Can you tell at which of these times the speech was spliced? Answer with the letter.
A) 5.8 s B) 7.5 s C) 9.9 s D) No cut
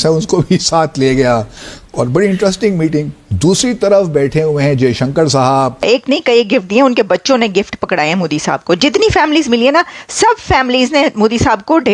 A